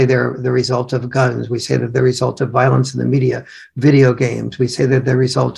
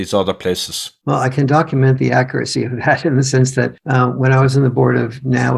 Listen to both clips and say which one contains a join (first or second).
second